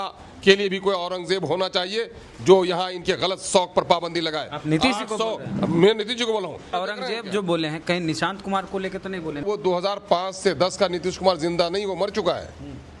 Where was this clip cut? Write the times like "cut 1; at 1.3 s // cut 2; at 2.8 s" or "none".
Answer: cut 1; at 6.6 s // cut 2; at 9.4 s